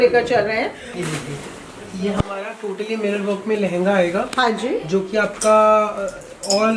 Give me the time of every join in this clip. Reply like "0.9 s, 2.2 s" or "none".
0.9 s